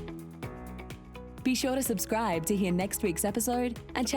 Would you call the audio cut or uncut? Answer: cut